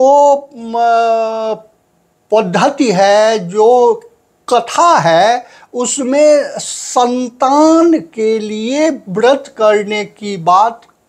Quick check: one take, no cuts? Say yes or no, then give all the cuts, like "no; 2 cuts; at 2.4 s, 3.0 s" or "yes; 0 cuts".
yes; 0 cuts